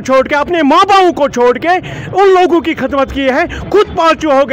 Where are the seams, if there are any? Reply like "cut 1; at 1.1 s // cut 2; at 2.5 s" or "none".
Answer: none